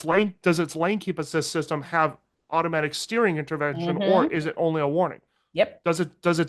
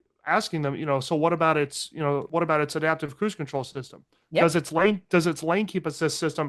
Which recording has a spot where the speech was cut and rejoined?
second; 1 cut; at 2.3 s

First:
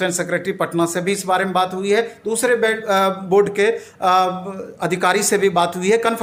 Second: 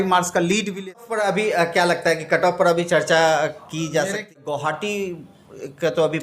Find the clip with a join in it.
second; 2 cuts; at 1.0 s, 4.2 s

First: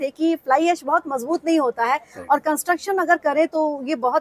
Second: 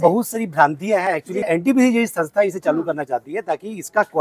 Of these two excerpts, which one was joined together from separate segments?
second; 1 cut; at 1.4 s

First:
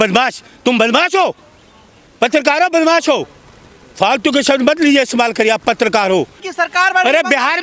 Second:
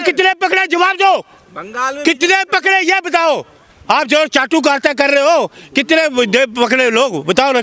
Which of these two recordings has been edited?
first; 1 cut; at 6.4 s

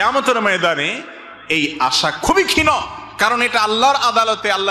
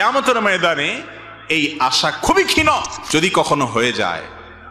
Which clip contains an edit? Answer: second; 1 cut; at 3.0 s

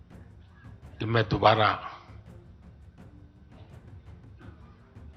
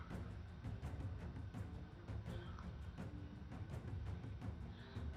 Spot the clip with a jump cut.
first; 2 cuts; at 1.0 s, 2.0 s

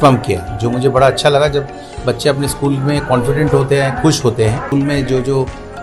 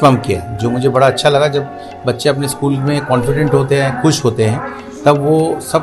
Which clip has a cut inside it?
first; 1 cut; at 4.7 s

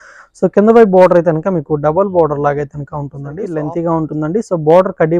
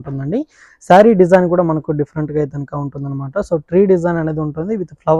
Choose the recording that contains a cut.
first; 1 cut; at 3.4 s

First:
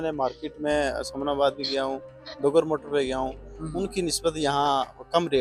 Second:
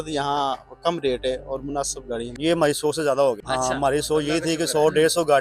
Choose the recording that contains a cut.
second; 2 cuts; at 2.3 s, 3.4 s

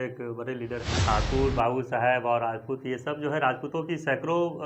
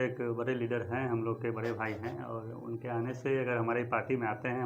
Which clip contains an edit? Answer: first; 1 cut; at 0.9 s

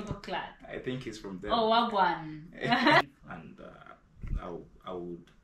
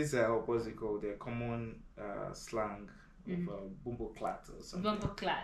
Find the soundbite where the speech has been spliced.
first; 1 cut; at 3.0 s

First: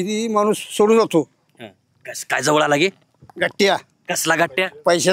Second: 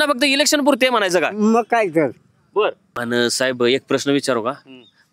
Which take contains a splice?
second; 1 cut; at 2.9 s

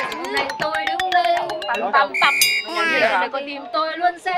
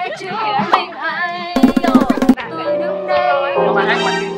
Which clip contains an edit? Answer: second; 1 cut; at 2.3 s

